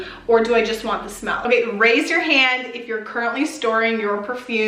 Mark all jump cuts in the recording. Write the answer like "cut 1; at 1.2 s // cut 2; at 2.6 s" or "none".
cut 1; at 1.4 s